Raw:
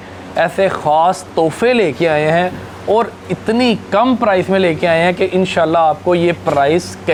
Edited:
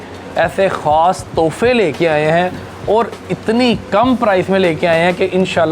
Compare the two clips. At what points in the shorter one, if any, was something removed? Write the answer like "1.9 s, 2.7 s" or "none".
none